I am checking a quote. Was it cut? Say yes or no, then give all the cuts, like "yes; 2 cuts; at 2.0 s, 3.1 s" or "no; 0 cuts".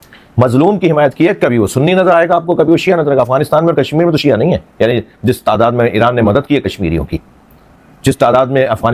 no; 0 cuts